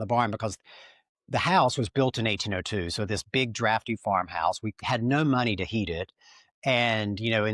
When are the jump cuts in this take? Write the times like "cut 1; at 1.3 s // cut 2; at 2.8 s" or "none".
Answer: cut 1; at 4.8 s